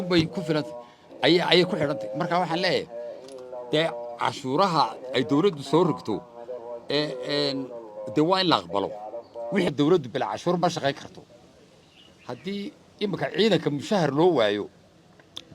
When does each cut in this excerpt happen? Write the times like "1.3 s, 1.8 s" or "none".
9.7 s